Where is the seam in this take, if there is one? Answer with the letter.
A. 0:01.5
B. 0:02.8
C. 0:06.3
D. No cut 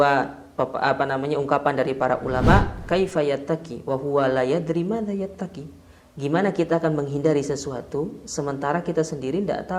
B